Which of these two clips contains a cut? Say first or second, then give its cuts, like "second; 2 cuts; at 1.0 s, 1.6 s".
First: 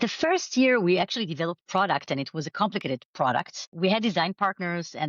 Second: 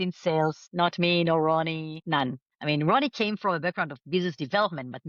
first; 2 cuts; at 1.6 s, 3.6 s